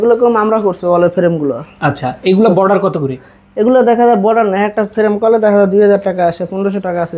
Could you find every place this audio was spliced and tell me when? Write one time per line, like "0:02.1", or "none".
none